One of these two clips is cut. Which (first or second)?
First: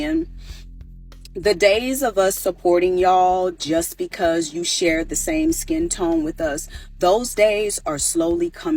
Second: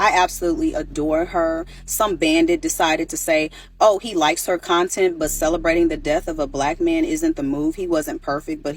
second